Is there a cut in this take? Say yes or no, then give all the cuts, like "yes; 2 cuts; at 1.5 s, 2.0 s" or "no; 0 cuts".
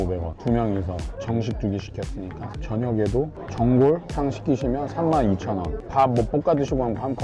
yes; 1 cut; at 4.1 s